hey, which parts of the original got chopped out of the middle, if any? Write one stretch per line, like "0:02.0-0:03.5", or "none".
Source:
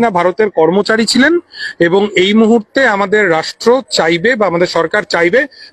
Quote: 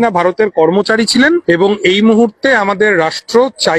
0:01.4-0:01.7

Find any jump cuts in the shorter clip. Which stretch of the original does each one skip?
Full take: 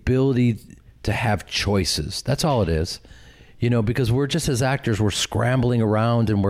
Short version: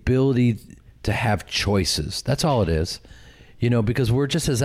none

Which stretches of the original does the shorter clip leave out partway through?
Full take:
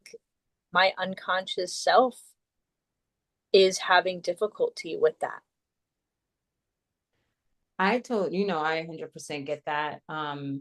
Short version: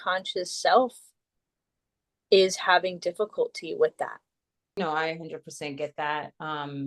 0:06.0-0:08.5

